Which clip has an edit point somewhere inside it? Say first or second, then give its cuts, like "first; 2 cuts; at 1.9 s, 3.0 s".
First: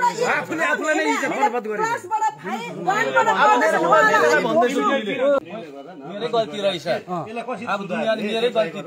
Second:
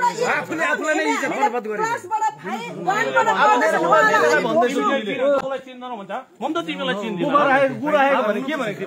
first; 1 cut; at 5.5 s